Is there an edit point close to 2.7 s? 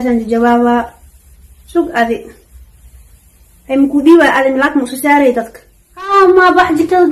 no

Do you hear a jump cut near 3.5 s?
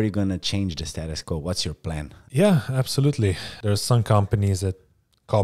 yes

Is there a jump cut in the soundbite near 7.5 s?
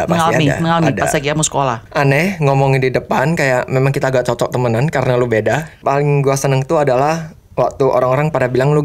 no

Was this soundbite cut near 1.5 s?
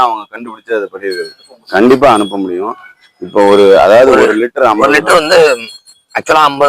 yes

